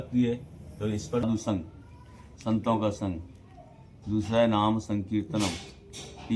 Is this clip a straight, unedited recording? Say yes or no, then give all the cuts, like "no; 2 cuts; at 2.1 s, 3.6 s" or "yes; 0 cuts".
no; 1 cut; at 1.2 s